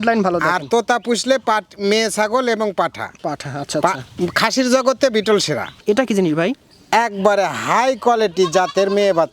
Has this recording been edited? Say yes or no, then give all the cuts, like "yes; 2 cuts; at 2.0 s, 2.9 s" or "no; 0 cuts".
yes; 1 cut; at 5.8 s